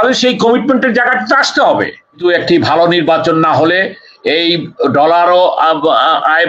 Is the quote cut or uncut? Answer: cut